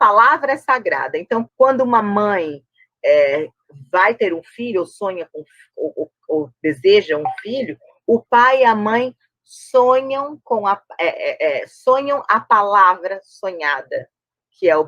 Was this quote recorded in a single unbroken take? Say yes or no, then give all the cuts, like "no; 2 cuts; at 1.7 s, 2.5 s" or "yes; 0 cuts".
no; 1 cut; at 1.5 s